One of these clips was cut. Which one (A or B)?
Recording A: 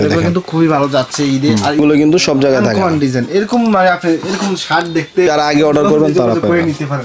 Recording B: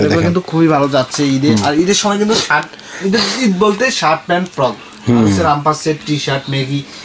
A